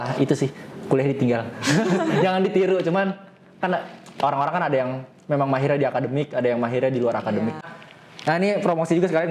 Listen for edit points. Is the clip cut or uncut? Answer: cut